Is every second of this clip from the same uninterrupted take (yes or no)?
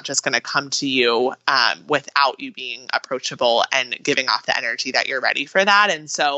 yes